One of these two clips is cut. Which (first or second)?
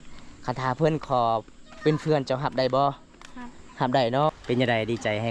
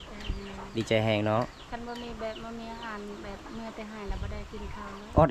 first